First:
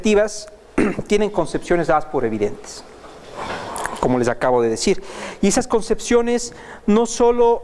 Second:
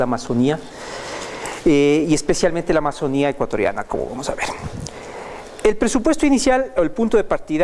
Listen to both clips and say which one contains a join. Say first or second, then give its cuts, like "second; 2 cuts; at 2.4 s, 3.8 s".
second; 1 cut; at 3.4 s